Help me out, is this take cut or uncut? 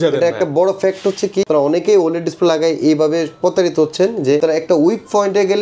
cut